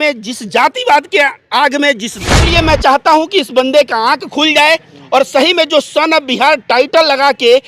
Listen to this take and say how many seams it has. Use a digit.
1